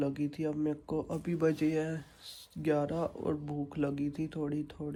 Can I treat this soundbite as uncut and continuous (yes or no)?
yes